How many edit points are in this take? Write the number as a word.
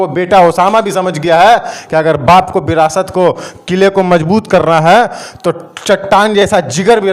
zero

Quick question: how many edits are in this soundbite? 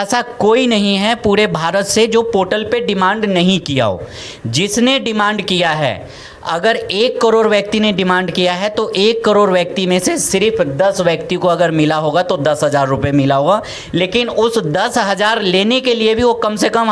zero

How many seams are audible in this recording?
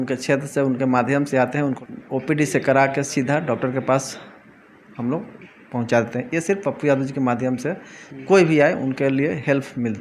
one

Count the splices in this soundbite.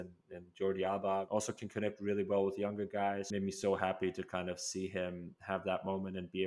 two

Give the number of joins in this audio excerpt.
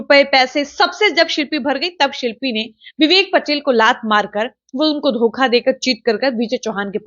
zero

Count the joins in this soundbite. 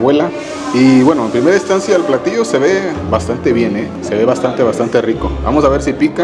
one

